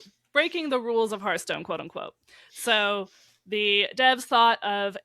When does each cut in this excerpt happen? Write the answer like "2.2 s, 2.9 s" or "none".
none